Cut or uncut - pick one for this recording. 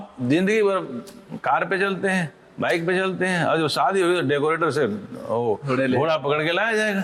uncut